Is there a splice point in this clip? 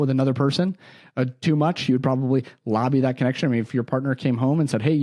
no; 0 cuts

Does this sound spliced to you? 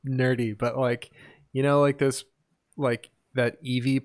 no; 0 cuts

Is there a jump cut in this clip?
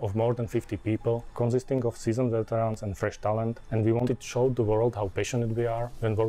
yes; 1 cut; at 1.4 s

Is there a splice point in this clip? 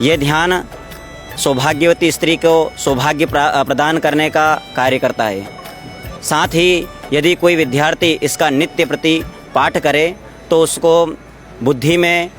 no; 0 cuts

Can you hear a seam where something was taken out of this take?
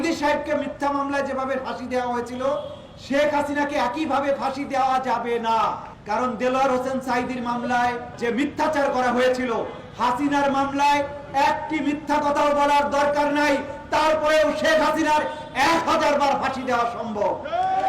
yes; 2 cuts; at 5.9 s, 8.1 s

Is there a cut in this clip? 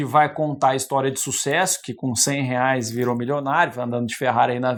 no; 0 cuts

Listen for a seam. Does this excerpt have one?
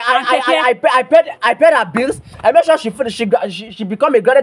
no; 0 cuts

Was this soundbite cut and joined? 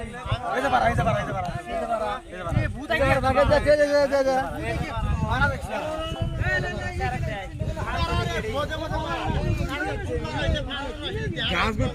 no; 0 cuts

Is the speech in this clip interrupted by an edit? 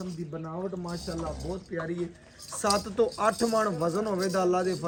no; 0 cuts

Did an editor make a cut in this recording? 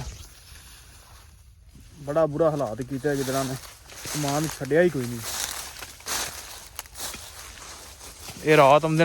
yes; 1 cut; at 1.6 s

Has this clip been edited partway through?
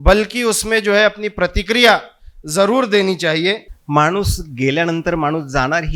yes; 1 cut; at 3.7 s

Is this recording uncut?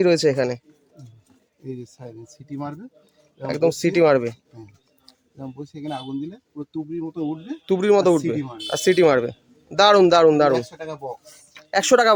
yes; 0 cuts

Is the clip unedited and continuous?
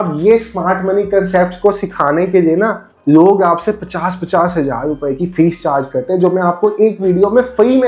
yes; 0 cuts

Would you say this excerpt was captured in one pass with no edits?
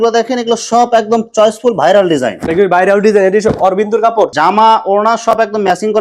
yes; 0 cuts

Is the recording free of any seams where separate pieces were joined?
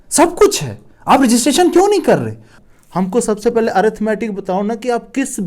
no; 1 cut; at 2.5 s

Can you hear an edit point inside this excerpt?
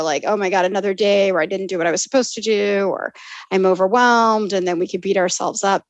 no; 0 cuts

